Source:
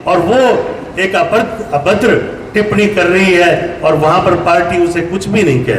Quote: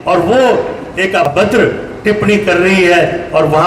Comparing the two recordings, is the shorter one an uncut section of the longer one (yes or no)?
no